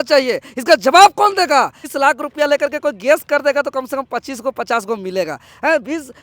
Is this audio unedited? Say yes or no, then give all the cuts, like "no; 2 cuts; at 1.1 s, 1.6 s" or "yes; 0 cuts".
no; 1 cut; at 1.8 s